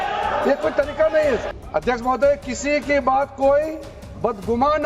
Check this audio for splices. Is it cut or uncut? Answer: cut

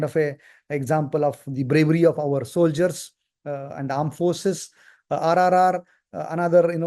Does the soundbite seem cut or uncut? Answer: uncut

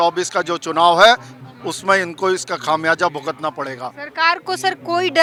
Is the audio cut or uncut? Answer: uncut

